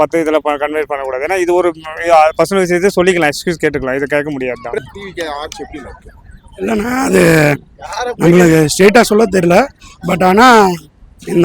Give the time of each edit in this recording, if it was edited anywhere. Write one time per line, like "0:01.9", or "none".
0:04.8